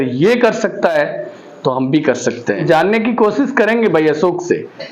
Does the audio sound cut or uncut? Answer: cut